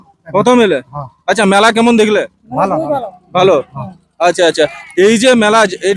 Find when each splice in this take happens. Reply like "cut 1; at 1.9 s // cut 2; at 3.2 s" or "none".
none